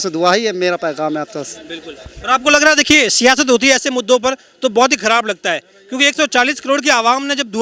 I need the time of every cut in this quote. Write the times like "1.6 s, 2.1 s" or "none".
none

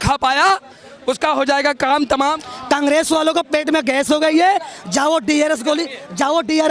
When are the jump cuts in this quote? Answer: 2.4 s

